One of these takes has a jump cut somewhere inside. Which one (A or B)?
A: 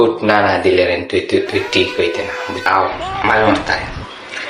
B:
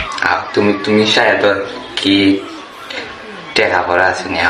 A